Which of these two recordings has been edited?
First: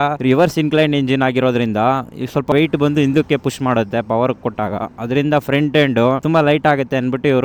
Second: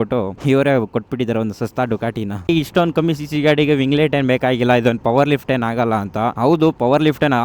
second; 1 cut; at 2.5 s

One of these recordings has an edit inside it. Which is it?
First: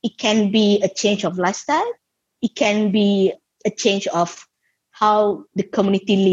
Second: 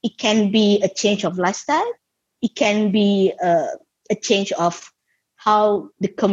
first; 1 cut; at 3.4 s

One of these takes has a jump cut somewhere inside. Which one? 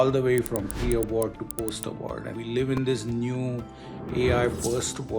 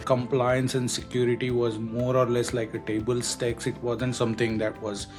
first; 1 cut; at 2.3 s

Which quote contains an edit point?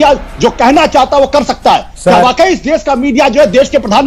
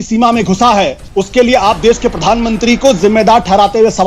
second; 1 cut; at 1.0 s

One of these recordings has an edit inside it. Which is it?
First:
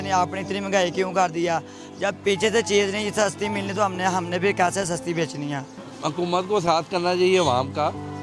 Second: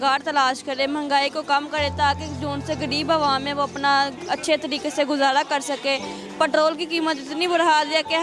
first; 1 cut; at 5.9 s

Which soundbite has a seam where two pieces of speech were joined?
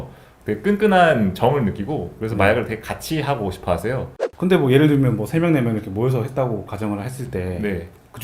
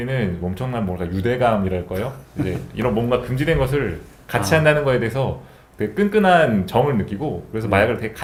first; 1 cut; at 4.2 s

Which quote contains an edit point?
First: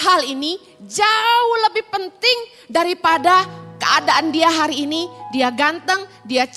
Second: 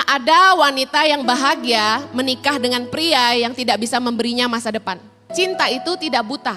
second; 1 cut; at 5.3 s

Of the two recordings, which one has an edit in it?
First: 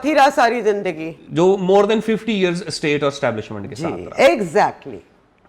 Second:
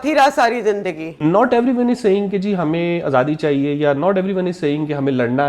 second; 1 cut; at 1.2 s

